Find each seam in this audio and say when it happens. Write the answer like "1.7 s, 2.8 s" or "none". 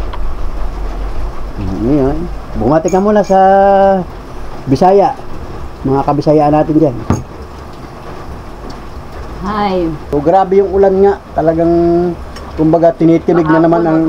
10.0 s